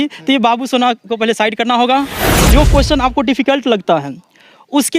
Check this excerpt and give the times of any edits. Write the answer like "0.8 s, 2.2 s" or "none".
2.4 s